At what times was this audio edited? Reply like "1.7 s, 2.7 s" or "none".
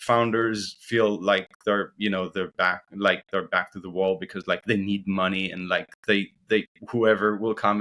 none